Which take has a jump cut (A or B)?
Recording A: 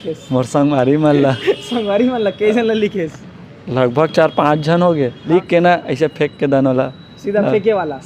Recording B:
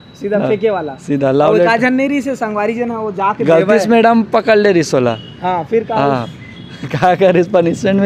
A